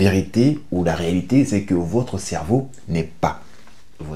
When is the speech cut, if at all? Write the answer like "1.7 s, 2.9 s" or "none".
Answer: none